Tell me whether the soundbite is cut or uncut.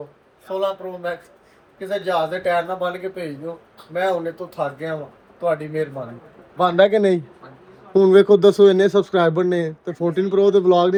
uncut